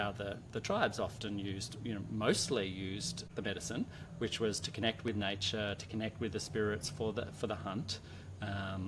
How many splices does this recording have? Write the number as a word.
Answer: one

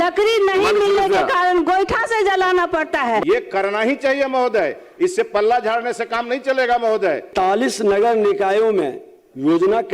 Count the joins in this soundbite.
two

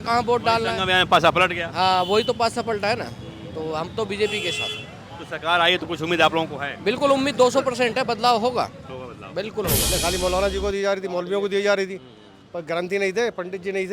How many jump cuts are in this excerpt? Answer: one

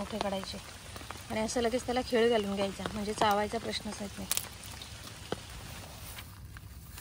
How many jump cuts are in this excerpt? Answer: one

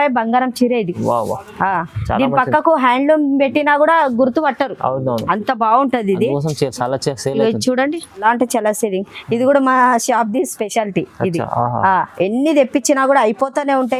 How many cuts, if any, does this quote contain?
one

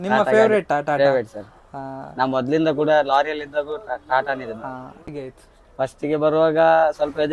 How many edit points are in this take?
one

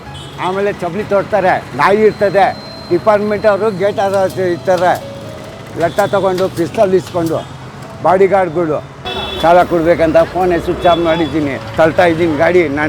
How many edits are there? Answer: one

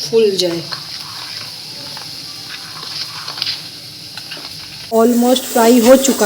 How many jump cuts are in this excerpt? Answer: one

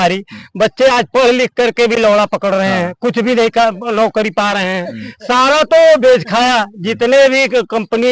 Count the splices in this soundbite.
zero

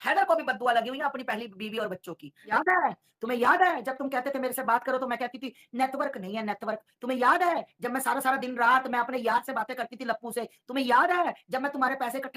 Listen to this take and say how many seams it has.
one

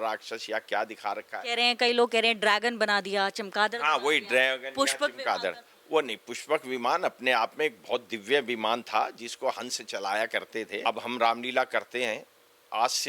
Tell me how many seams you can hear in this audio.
one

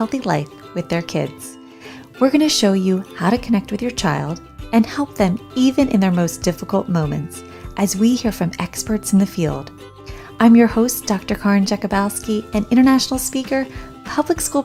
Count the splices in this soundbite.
zero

